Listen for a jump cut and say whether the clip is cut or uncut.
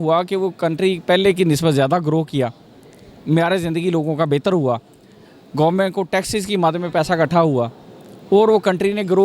uncut